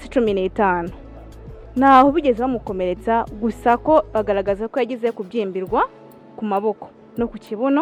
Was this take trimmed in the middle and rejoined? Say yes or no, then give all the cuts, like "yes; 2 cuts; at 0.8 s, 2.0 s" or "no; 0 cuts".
no; 0 cuts